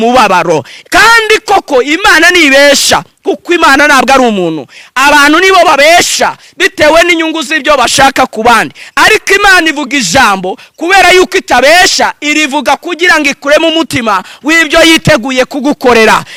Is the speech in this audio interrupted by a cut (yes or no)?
no